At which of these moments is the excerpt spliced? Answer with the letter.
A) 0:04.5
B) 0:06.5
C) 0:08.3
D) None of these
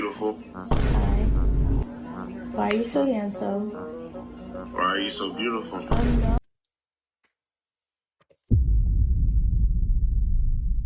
D